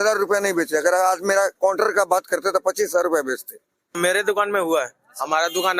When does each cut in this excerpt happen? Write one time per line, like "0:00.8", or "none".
0:03.9